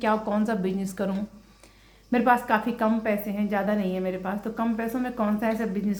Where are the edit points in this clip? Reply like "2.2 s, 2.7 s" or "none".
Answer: none